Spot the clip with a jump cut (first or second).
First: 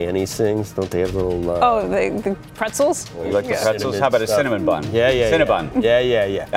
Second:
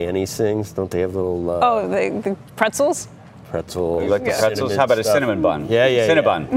first